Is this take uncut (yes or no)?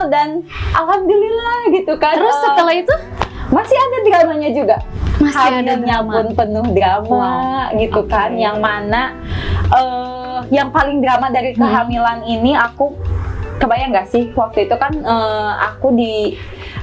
yes